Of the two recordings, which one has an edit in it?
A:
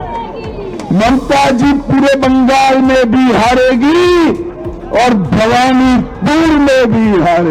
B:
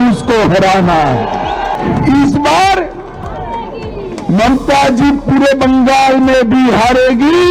B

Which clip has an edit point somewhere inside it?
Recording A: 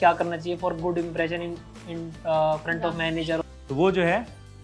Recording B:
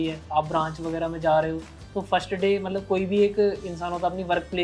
A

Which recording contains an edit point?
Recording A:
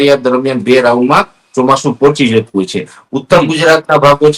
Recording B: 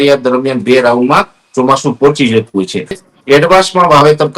B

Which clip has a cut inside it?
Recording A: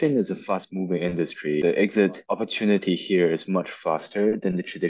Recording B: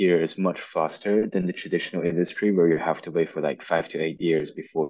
A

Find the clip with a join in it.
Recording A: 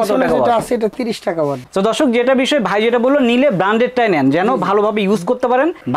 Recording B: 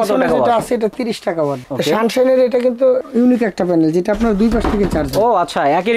B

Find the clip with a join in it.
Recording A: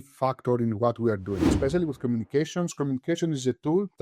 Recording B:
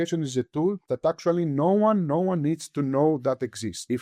A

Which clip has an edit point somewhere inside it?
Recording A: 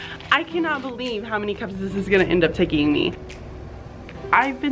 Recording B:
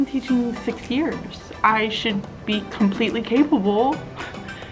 A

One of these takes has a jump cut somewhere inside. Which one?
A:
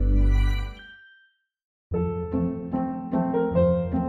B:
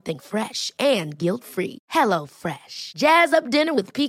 A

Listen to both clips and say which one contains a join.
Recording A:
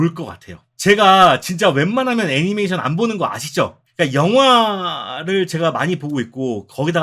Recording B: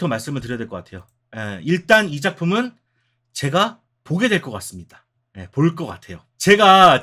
A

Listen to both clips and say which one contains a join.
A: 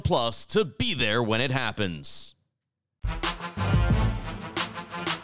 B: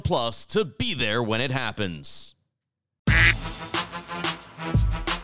B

